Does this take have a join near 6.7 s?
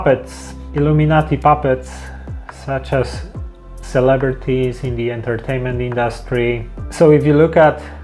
yes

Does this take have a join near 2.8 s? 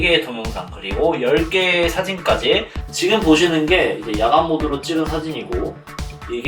yes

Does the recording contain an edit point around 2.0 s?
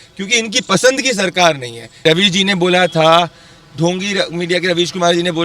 yes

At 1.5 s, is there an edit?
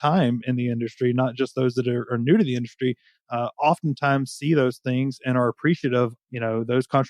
no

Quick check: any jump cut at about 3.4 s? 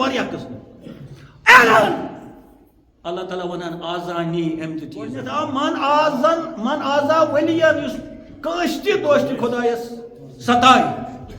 no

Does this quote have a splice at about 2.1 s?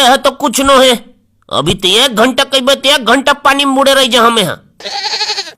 no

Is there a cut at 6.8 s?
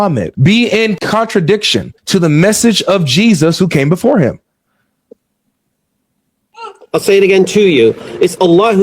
no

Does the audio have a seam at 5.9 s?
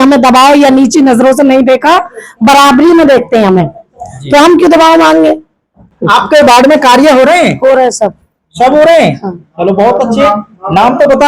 yes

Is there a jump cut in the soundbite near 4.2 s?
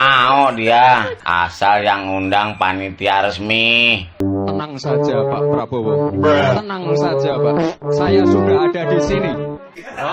yes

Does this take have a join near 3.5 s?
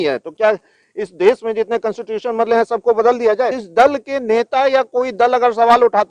yes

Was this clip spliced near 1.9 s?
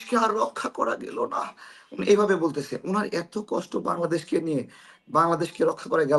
no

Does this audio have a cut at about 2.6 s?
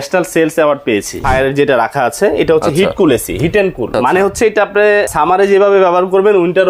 no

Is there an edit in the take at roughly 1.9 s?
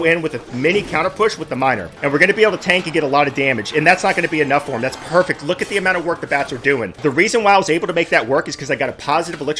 no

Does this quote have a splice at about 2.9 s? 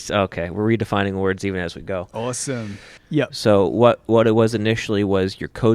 yes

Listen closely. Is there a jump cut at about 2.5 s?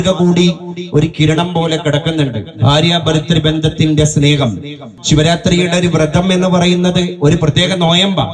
no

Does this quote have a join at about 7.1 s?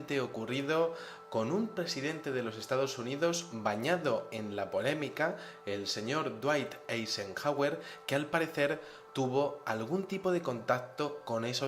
no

